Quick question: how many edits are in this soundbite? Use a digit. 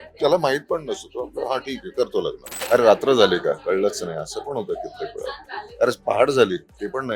1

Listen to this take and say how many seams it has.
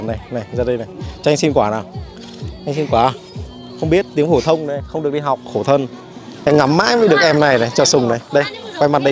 1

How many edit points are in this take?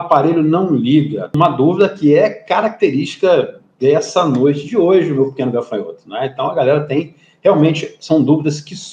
1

